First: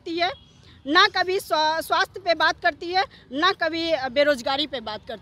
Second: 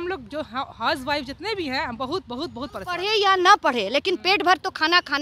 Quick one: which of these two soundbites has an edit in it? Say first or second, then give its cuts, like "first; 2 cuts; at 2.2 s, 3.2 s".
second; 1 cut; at 3.0 s